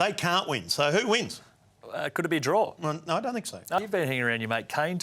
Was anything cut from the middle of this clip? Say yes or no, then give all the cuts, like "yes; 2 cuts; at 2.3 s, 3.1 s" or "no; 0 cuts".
yes; 1 cut; at 3.8 s